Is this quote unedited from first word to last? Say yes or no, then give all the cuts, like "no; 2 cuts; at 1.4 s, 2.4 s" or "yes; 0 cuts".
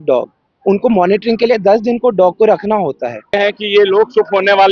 no; 1 cut; at 3.4 s